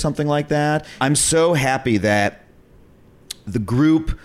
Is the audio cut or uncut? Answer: cut